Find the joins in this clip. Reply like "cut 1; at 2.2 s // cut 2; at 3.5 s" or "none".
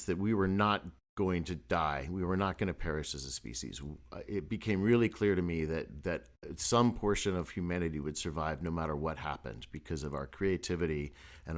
none